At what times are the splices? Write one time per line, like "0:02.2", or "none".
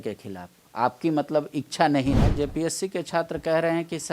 0:02.3